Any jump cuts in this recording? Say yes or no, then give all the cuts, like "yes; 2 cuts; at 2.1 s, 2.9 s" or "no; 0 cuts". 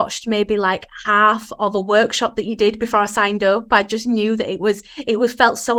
no; 0 cuts